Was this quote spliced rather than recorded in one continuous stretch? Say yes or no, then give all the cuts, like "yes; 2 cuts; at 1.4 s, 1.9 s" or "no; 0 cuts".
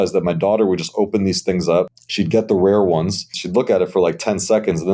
yes; 2 cuts; at 2.0 s, 3.4 s